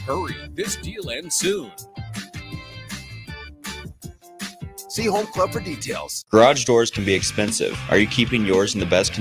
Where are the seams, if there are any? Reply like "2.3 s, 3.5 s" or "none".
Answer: 6.1 s

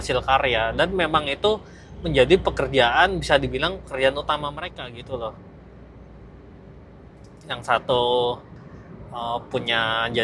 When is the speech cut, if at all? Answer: none

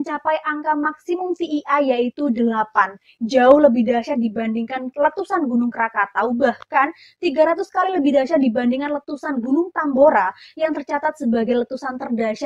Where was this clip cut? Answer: none

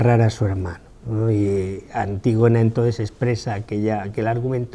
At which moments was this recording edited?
none

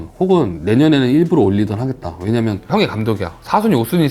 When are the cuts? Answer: 2.7 s

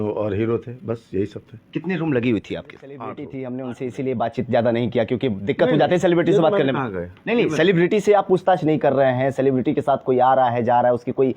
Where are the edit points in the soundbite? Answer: 3.2 s

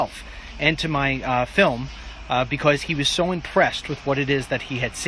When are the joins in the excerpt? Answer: 1.2 s

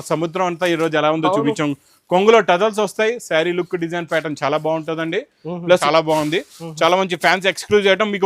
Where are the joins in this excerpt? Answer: 5.8 s

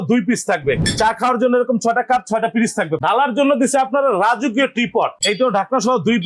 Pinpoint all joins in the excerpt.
0.8 s, 3.0 s, 5.2 s

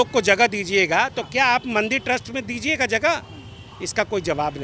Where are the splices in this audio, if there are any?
none

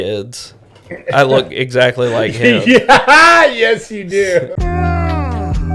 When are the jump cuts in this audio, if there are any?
4.5 s

